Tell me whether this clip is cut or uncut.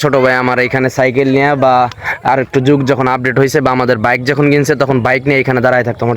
uncut